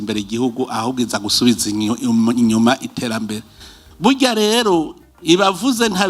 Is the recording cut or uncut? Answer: uncut